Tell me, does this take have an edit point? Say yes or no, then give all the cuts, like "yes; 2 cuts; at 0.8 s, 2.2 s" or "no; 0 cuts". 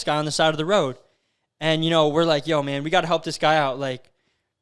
no; 0 cuts